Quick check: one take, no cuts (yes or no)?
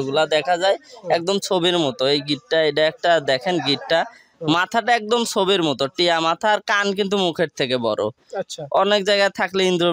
yes